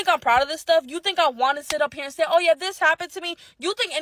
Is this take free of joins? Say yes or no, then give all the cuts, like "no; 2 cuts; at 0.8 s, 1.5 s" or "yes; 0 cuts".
yes; 0 cuts